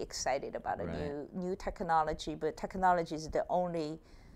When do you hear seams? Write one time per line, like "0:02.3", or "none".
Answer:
none